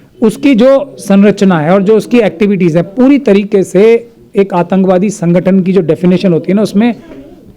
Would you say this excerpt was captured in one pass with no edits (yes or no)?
yes